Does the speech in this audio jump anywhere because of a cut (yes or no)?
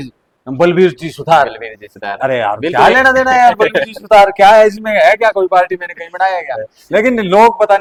no